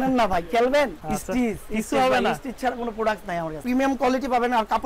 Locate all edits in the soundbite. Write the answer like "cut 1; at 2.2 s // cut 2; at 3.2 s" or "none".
cut 1; at 1.0 s // cut 2; at 3.6 s